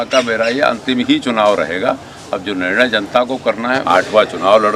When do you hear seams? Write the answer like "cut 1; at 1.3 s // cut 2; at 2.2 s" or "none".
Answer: cut 1; at 3.8 s